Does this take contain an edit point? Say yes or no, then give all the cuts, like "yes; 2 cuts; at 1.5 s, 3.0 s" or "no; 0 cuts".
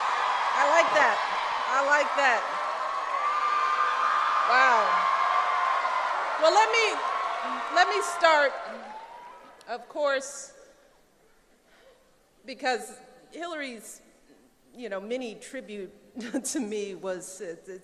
yes; 1 cut; at 15.5 s